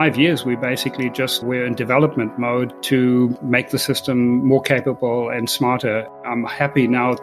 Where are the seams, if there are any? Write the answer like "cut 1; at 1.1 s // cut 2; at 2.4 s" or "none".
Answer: cut 1; at 1.4 s // cut 2; at 2.8 s // cut 3; at 3.4 s // cut 4; at 6.2 s